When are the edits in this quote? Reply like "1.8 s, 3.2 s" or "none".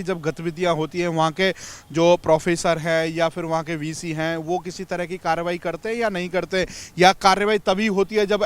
none